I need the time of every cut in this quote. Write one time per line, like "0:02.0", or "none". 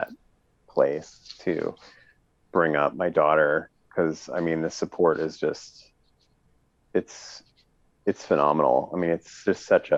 none